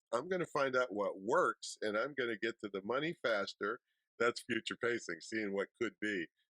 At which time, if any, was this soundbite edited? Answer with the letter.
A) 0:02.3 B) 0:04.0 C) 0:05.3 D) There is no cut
B